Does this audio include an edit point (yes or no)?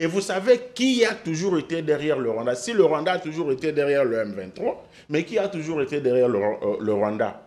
no